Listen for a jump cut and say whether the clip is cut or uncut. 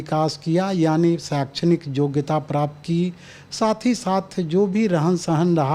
uncut